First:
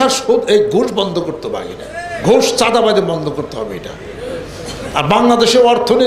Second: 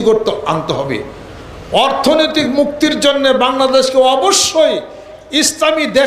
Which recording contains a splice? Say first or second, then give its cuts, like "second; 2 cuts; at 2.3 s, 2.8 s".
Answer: first; 1 cut; at 2.2 s